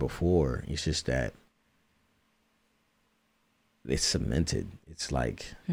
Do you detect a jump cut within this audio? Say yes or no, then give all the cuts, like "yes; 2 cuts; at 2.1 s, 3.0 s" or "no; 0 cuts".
no; 0 cuts